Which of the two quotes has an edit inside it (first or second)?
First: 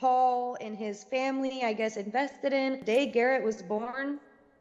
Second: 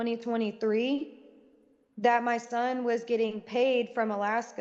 first